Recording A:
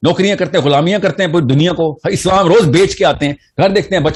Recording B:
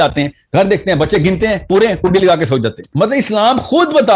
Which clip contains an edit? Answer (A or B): B